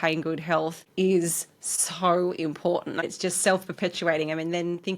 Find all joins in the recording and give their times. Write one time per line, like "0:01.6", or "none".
0:03.0